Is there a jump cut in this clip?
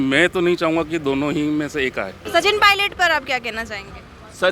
yes; 1 cut; at 2.2 s

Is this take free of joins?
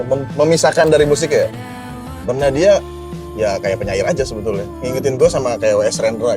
no; 1 cut; at 4.8 s

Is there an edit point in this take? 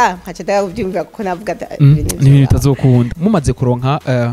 yes; 1 cut; at 3.1 s

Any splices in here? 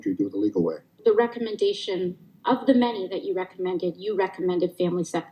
yes; 1 cut; at 0.9 s

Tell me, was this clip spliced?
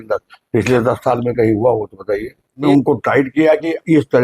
yes; 1 cut; at 2.6 s

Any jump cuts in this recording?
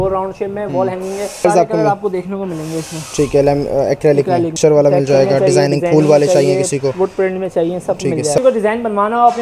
yes; 3 cuts; at 1.4 s, 4.6 s, 8.4 s

